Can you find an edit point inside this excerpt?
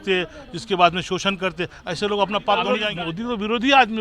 yes; 1 cut; at 2.8 s

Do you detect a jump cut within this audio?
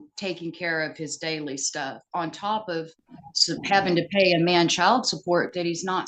no; 0 cuts

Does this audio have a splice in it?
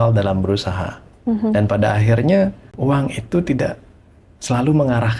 yes; 1 cut; at 2.7 s

